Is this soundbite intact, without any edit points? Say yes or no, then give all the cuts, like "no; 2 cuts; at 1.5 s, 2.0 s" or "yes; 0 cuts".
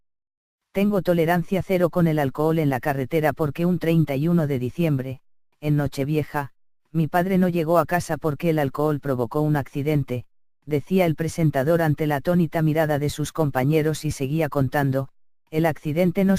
yes; 0 cuts